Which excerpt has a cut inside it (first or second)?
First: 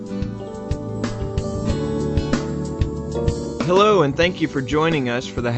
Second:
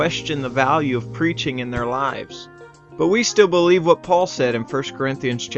first